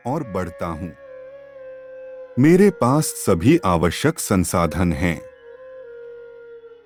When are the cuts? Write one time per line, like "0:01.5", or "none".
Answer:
none